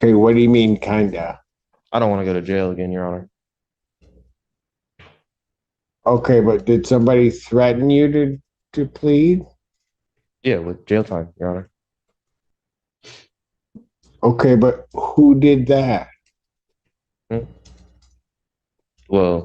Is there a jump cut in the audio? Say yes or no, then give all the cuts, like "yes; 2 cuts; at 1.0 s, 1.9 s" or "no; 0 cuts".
no; 0 cuts